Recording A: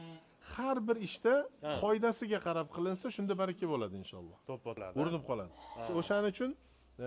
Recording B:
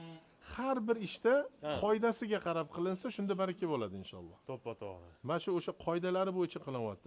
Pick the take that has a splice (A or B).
A